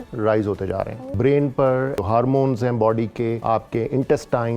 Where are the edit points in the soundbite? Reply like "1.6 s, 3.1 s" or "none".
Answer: 1.0 s, 2.0 s, 3.4 s